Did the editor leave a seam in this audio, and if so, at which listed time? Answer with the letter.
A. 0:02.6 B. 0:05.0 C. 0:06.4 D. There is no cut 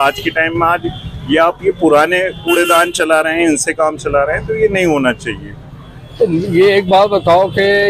D